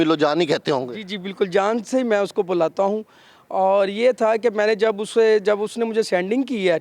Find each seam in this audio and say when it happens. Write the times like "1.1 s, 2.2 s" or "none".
none